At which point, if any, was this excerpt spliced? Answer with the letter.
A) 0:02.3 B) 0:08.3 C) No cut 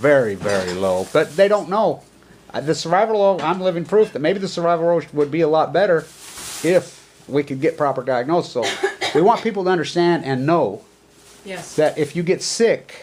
A